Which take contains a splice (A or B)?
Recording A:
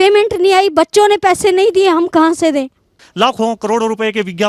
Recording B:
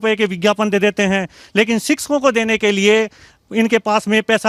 A